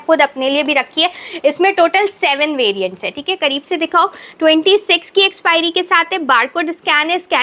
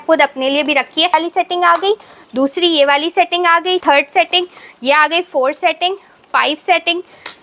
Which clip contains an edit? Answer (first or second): second